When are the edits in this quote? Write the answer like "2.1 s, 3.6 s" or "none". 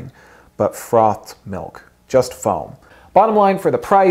2.9 s